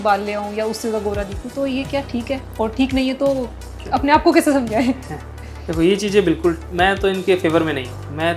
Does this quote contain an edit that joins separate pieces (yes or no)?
no